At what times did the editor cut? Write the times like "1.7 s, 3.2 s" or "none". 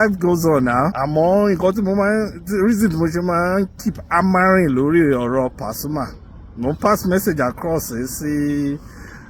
1.0 s